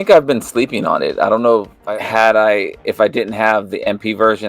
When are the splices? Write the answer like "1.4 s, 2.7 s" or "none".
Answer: 1.7 s